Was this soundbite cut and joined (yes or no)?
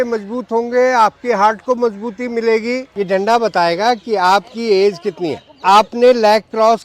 no